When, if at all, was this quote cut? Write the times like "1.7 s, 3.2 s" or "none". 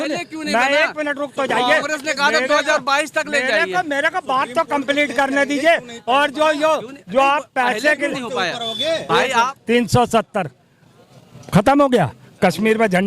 9.5 s